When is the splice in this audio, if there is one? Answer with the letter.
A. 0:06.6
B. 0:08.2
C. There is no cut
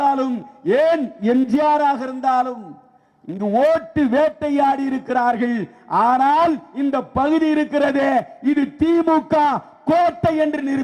C